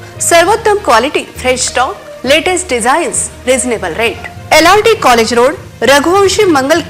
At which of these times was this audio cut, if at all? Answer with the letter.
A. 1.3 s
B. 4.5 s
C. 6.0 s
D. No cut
D